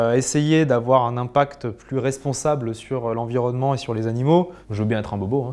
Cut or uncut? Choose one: uncut